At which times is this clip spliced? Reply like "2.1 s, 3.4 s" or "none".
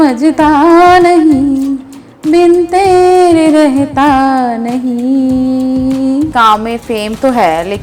6.3 s